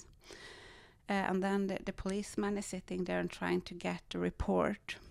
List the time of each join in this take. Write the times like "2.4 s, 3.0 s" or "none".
none